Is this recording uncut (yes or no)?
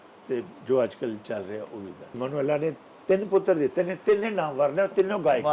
no